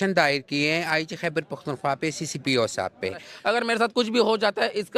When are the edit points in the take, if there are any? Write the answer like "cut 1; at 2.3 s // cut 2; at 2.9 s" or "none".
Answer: cut 1; at 3.3 s